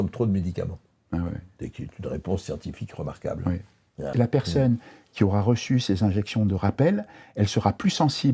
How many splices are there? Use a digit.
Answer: 1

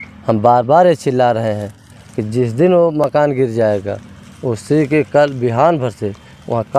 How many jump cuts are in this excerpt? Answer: 0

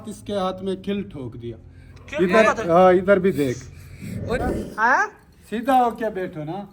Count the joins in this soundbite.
1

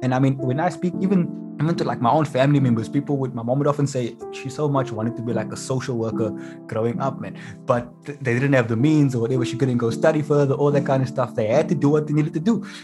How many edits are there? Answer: 1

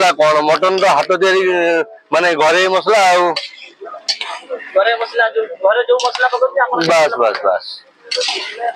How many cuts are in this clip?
0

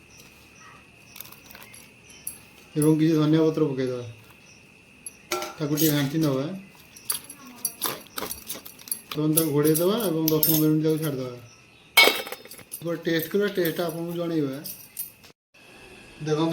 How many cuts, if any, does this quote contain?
2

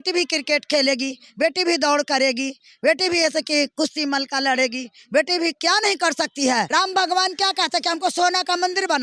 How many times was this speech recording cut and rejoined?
1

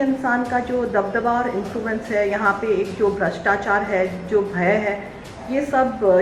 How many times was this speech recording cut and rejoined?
0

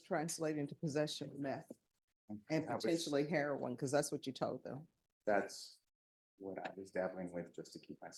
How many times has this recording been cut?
0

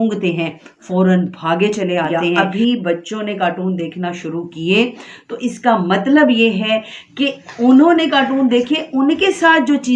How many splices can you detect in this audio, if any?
1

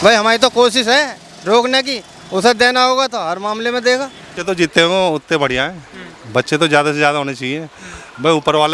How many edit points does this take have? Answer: 1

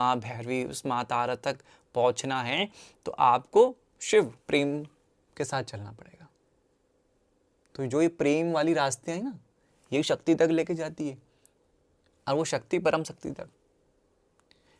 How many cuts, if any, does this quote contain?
0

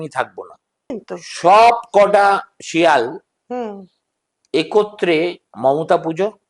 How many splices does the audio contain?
1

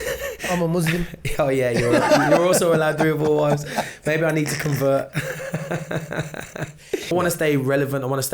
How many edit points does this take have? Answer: 1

